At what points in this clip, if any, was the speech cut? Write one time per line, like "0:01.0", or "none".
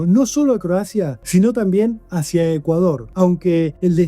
0:01.2
0:03.3